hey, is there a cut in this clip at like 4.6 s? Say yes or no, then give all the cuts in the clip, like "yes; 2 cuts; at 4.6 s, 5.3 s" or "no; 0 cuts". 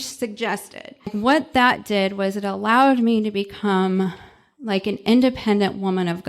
no; 1 cut; at 1.1 s